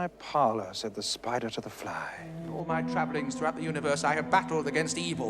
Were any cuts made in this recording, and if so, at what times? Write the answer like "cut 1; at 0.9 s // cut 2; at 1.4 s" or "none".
cut 1; at 2.2 s